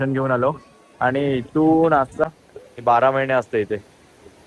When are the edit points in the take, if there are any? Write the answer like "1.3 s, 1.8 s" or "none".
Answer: 2.2 s